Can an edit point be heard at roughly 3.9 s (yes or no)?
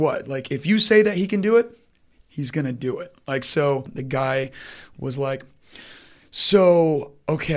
yes